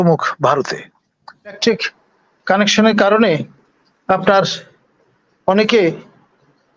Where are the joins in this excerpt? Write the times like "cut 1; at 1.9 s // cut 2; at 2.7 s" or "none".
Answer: cut 1; at 1.6 s